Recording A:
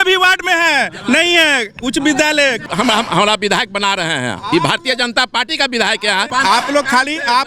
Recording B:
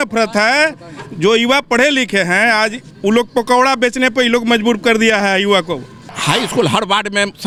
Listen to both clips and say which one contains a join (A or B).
A